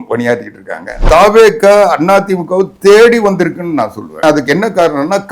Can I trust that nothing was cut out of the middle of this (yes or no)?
no